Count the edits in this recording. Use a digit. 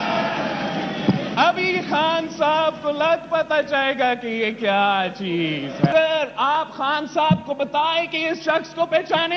1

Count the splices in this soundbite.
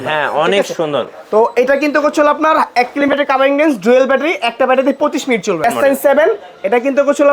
1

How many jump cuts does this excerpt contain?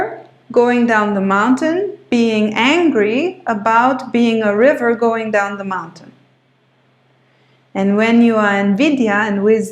0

